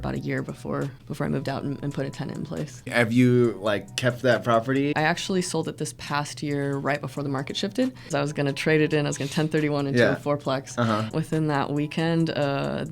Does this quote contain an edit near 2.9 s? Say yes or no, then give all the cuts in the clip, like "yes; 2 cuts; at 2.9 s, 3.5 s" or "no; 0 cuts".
yes; 5 cuts; at 1.0 s, 2.9 s, 4.9 s, 8.1 s, 11.1 s